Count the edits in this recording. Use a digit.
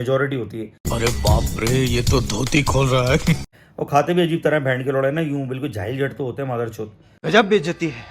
2